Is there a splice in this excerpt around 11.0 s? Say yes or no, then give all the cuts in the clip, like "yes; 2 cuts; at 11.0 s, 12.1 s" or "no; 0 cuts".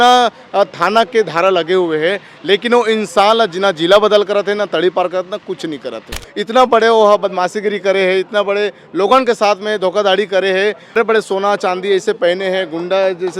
yes; 2 cuts; at 6.3 s, 11.0 s